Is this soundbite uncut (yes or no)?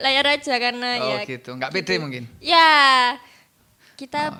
yes